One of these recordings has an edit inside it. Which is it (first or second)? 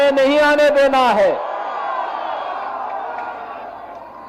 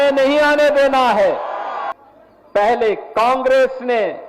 second